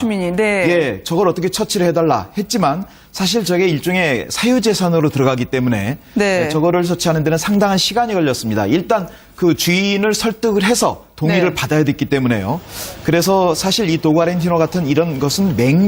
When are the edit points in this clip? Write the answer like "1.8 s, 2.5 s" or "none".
12.3 s

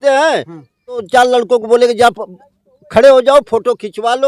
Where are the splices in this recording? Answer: 1.1 s

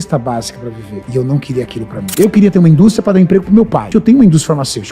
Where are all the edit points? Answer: 2.1 s, 3.9 s

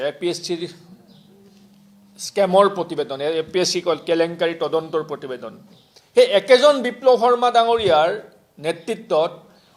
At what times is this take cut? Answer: none

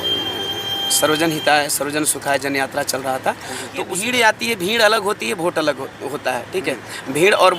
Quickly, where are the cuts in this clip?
3.9 s

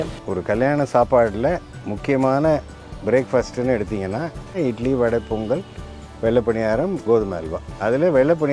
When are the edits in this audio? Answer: 4.6 s

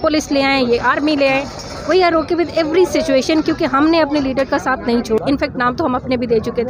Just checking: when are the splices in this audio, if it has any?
5.2 s

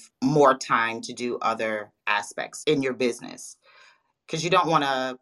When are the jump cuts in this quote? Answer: 2.5 s

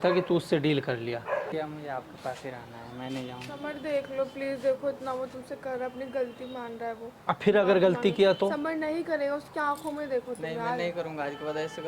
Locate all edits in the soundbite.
1.6 s

